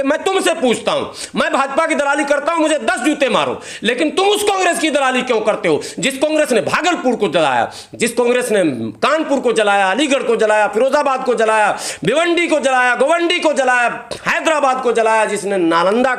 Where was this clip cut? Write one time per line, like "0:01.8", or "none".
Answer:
none